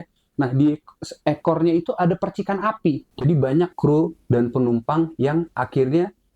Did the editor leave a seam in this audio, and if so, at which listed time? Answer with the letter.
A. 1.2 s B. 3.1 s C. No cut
B